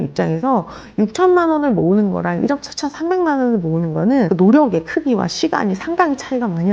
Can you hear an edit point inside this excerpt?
yes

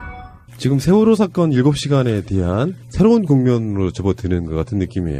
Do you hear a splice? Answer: no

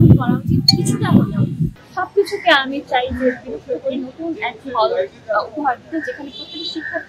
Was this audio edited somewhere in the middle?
yes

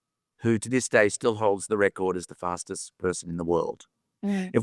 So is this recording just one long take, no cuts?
yes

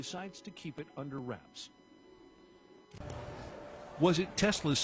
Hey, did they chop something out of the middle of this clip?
no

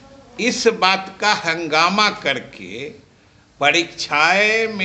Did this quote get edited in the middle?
no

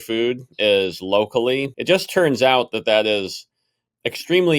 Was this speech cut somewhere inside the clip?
yes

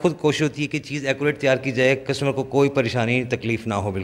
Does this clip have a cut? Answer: no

